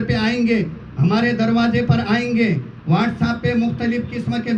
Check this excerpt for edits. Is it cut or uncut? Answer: uncut